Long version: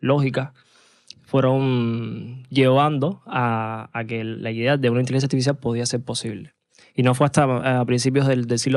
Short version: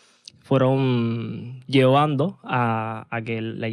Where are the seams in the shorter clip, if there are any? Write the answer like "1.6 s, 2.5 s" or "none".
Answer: none